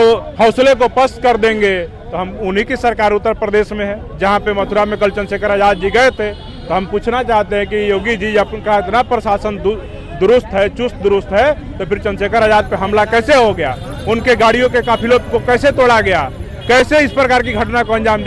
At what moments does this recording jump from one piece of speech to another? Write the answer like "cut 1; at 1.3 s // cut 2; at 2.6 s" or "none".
none